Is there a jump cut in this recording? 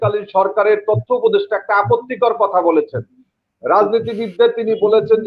no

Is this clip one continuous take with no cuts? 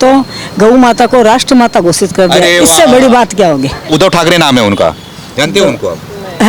no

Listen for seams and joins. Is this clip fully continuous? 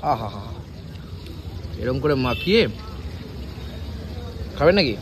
yes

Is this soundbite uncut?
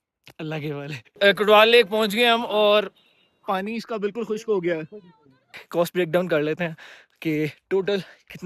no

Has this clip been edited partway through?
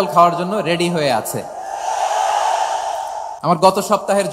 yes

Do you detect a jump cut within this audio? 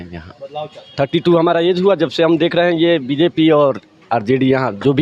no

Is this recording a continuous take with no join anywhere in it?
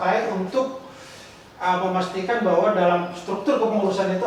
yes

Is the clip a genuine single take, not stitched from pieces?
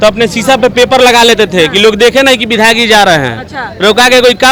yes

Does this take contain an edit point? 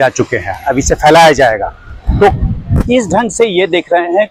no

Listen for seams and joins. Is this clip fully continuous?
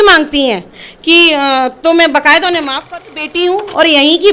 no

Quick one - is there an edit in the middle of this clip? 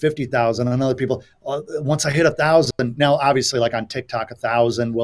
no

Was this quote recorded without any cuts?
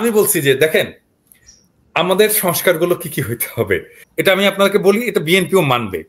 no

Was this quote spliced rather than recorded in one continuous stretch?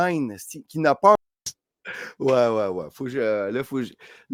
no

